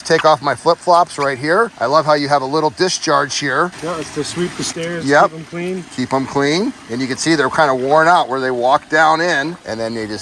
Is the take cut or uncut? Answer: uncut